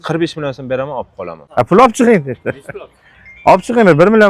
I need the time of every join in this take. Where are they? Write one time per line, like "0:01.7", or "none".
0:01.4